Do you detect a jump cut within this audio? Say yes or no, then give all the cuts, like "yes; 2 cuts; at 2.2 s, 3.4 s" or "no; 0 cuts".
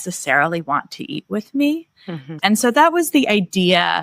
yes; 1 cut; at 2.3 s